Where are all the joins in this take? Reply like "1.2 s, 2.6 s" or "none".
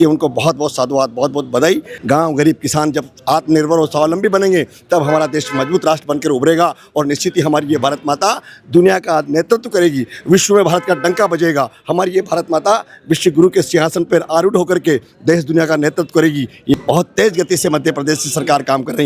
1.9 s, 16.7 s